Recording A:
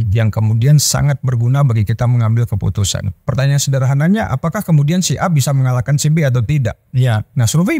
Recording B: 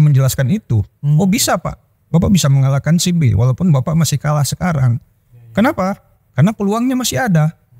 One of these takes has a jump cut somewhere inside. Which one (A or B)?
A